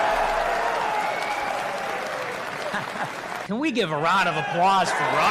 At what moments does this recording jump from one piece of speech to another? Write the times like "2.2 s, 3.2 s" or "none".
3.4 s